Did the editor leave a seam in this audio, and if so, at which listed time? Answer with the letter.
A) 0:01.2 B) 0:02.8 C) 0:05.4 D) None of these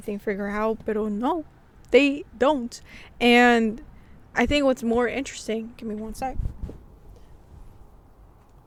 D